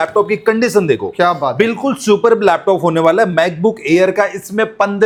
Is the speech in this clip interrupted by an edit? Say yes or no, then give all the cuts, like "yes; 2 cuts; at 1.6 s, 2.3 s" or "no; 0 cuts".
no; 0 cuts